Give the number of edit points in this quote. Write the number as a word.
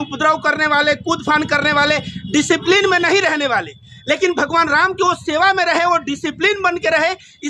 zero